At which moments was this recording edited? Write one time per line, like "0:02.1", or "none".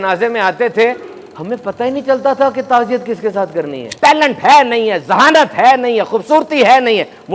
0:03.8